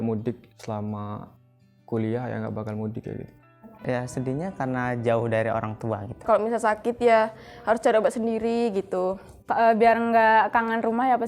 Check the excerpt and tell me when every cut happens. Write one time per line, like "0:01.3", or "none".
0:03.7
0:06.3
0:09.3